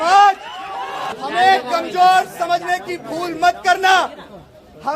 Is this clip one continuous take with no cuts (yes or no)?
no